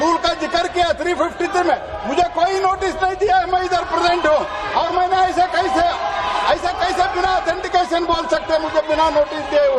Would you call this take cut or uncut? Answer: uncut